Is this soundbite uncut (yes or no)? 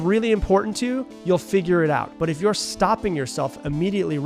no